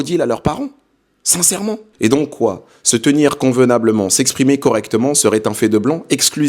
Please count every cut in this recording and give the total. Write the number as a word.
one